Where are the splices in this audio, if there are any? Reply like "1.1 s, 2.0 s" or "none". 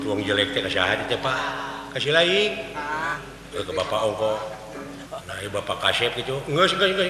5.0 s